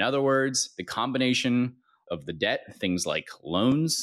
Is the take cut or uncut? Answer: cut